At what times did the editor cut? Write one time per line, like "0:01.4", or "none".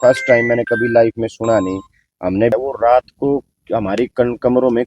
0:02.5